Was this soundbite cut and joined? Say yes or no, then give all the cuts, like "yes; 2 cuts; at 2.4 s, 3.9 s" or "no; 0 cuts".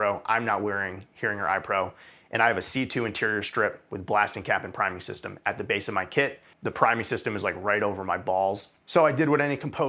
yes; 2 cuts; at 6.5 s, 8.7 s